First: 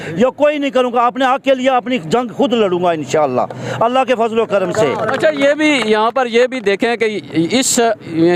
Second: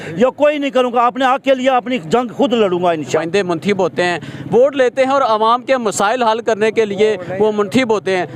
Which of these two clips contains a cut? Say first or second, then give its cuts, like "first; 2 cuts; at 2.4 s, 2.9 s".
second; 1 cut; at 3.2 s